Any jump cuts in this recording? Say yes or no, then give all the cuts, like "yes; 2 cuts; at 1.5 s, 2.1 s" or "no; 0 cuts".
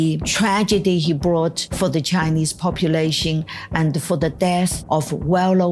yes; 2 cuts; at 1.6 s, 4.8 s